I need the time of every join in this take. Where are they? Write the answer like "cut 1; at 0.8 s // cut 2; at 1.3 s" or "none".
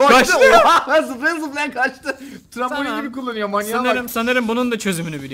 none